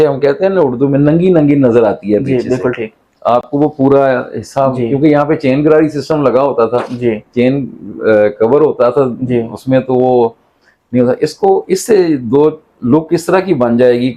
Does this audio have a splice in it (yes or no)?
no